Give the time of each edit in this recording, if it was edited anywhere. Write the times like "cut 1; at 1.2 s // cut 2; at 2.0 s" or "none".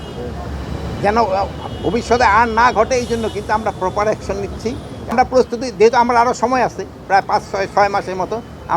cut 1; at 5.1 s